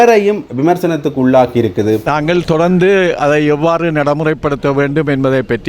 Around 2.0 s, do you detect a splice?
yes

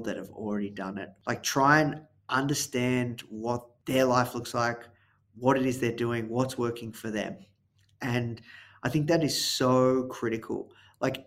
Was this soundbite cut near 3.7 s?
yes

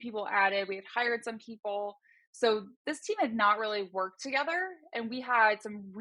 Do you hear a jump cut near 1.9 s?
no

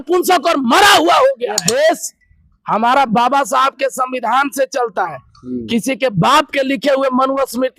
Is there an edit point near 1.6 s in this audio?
yes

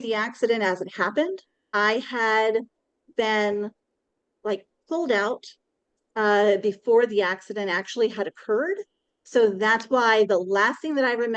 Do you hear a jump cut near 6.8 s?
no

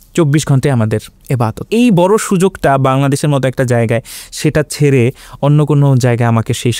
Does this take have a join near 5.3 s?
no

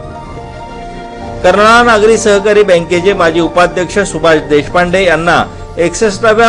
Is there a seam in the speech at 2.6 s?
no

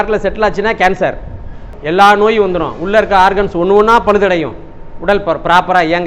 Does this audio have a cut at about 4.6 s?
no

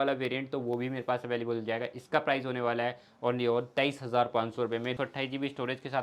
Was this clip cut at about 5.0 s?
yes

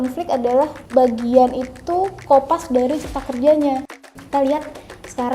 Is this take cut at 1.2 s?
no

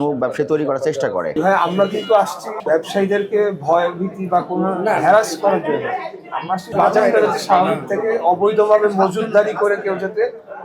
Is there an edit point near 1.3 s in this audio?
yes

